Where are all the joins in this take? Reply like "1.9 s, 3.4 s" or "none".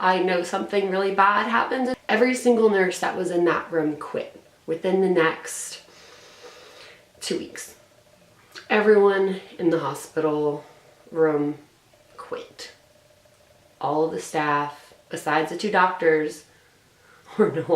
2.0 s